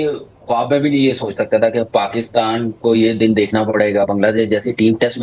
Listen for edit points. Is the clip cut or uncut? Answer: uncut